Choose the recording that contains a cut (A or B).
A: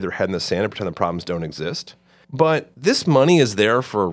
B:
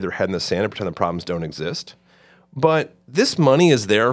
A